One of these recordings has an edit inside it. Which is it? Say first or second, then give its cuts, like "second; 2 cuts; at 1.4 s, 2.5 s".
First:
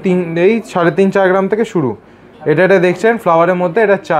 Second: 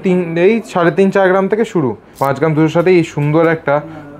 second; 1 cut; at 2.1 s